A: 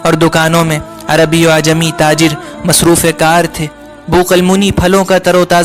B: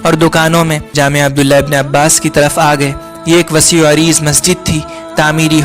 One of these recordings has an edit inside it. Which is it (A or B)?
B